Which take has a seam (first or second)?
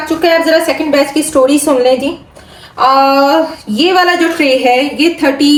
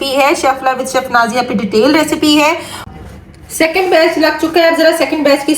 second